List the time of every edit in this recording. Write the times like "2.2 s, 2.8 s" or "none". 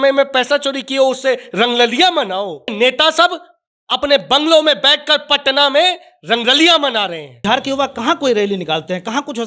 2.7 s, 7.3 s